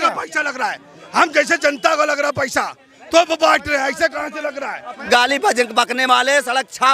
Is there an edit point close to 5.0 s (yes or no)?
yes